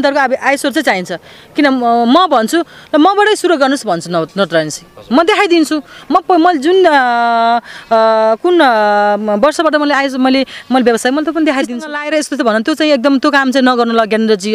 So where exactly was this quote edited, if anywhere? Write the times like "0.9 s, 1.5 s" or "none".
12.0 s